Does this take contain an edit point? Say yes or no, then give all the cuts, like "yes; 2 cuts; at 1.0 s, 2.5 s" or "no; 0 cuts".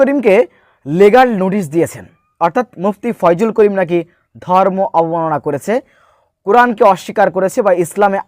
no; 0 cuts